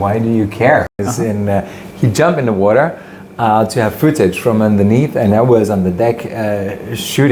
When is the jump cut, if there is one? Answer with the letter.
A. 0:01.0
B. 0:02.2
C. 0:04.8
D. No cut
A